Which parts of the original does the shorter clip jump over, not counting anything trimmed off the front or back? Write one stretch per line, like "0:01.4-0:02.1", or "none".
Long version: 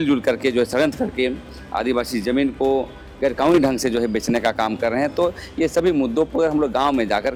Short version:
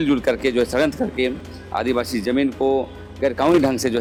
none